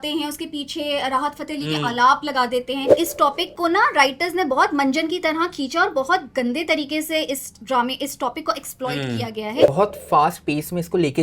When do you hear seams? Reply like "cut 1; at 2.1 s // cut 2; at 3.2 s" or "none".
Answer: cut 1; at 2.9 s // cut 2; at 9.7 s